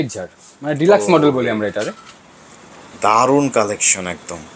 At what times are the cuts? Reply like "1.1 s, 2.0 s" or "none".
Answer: none